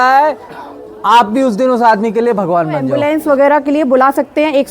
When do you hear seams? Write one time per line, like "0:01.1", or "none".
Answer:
0:02.9